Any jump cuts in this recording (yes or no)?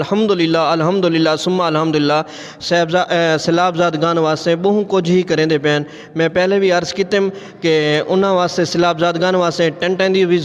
no